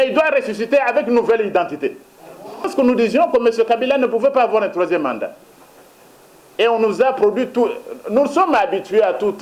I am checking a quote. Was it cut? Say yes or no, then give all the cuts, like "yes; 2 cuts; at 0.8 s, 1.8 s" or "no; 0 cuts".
yes; 1 cut; at 2.7 s